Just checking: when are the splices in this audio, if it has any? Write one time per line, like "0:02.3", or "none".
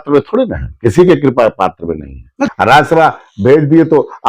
0:02.5